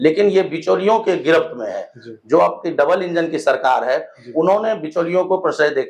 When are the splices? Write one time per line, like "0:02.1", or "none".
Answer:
none